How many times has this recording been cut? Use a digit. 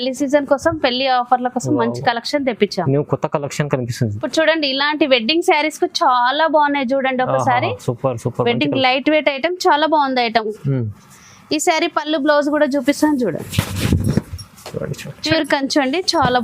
2